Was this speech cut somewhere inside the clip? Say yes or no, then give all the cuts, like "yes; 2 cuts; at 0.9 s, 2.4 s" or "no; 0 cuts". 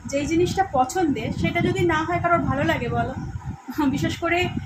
no; 0 cuts